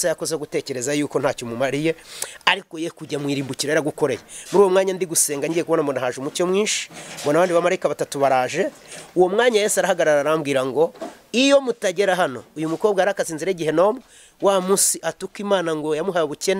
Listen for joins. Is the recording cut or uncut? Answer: uncut